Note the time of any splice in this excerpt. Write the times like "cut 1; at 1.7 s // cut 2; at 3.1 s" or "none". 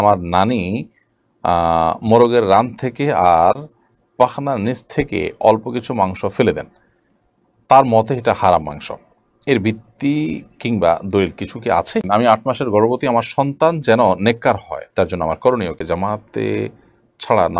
cut 1; at 12.1 s // cut 2; at 15.8 s